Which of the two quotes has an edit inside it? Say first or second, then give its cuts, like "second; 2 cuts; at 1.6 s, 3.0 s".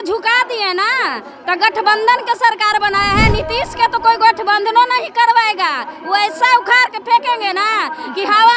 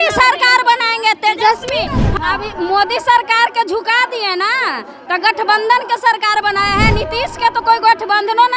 second; 1 cut; at 2.1 s